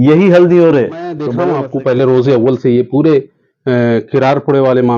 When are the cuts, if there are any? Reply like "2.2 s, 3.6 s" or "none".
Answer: 1.3 s